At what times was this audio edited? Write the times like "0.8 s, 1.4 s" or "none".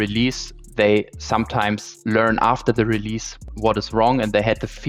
none